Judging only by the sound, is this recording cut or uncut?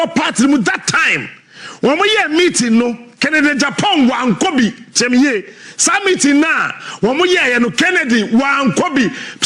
uncut